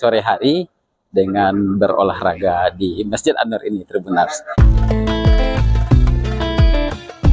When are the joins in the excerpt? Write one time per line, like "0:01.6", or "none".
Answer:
0:04.5